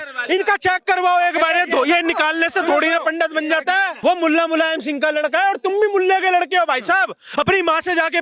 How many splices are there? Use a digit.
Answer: 1